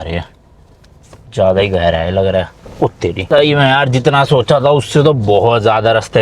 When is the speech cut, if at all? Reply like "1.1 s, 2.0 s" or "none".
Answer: 3.2 s